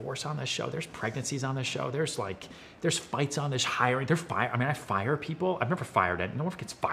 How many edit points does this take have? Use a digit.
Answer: 0